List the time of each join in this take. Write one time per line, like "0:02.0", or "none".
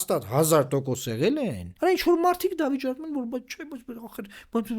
0:01.6